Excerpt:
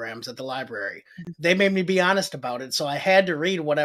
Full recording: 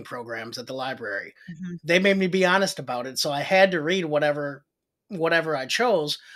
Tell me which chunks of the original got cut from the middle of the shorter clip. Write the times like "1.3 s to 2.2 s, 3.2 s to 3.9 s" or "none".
1.6 s to 1.7 s